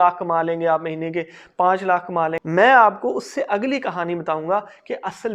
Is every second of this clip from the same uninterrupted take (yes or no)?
no